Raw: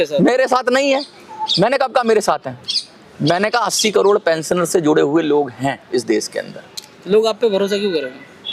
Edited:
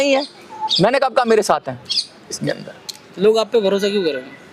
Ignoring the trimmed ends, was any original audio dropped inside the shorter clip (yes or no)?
yes